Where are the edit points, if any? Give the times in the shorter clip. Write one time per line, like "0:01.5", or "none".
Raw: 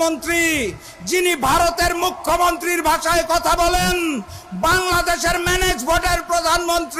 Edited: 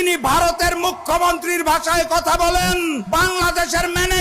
0:03.0